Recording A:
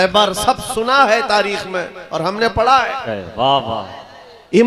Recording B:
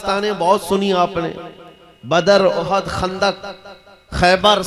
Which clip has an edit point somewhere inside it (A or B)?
A